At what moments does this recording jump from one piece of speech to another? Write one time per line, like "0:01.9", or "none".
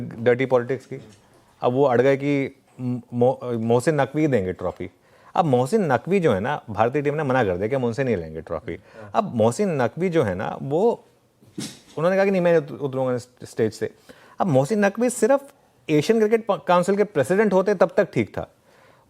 0:17.6